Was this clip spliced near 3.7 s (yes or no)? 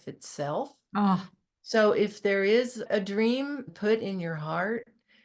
yes